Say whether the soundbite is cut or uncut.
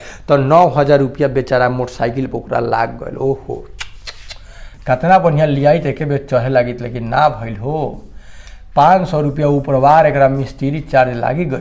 uncut